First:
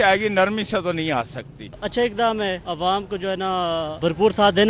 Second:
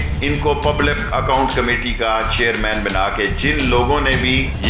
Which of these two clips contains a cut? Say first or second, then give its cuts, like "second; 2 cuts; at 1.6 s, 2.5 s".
first; 2 cuts; at 2.7 s, 4.0 s